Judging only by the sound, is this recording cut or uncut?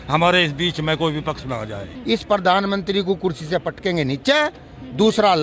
cut